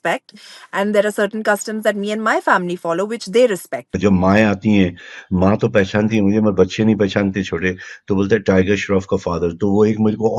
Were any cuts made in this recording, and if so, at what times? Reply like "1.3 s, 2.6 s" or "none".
3.9 s